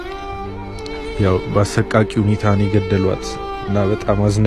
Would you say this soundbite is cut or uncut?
uncut